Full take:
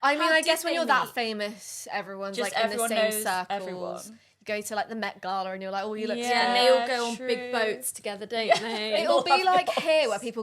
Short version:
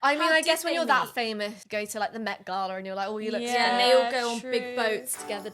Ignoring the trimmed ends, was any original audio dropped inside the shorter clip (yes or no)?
yes